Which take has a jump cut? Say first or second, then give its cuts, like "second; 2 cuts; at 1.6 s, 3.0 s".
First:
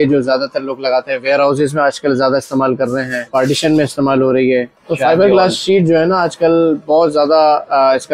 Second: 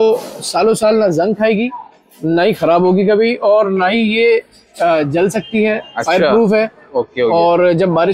first; 2 cuts; at 3.3 s, 4.8 s